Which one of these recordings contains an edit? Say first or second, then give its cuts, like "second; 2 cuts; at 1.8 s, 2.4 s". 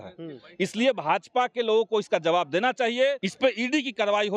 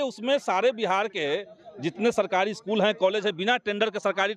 first; 1 cut; at 3.3 s